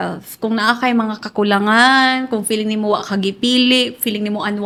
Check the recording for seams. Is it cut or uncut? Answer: uncut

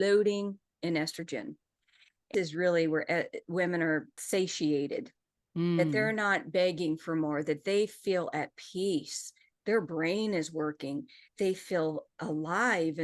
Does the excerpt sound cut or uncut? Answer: cut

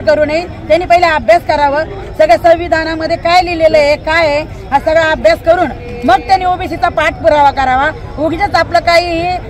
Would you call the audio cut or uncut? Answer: uncut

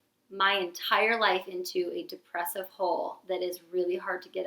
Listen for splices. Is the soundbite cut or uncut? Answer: uncut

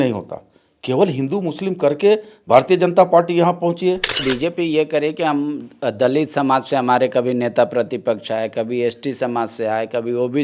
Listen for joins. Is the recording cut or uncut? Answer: cut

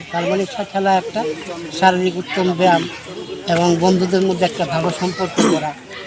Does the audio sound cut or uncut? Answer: uncut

